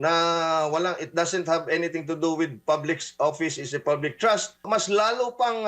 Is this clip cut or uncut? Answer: cut